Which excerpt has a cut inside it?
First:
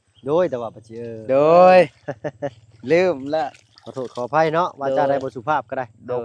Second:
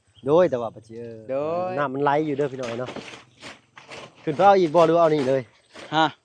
second; 1 cut; at 1.4 s

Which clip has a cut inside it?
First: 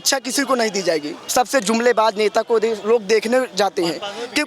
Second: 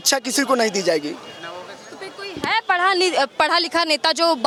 first; 1 cut; at 1.2 s

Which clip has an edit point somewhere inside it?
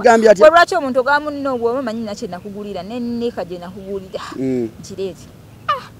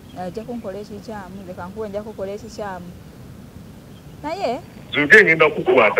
second; 1 cut; at 4.8 s

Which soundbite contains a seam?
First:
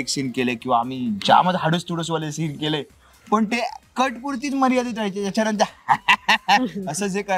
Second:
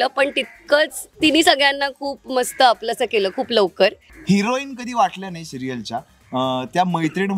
second; 1 cut; at 4.1 s

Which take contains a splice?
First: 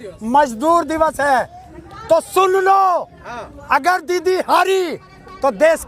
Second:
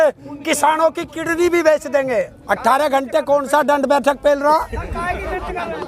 second; 1 cut; at 2.4 s

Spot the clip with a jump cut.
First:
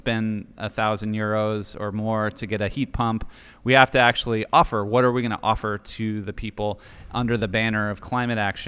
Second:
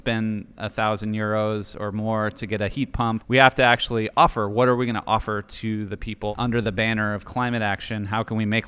second; 2 cuts; at 3.2 s, 6.3 s

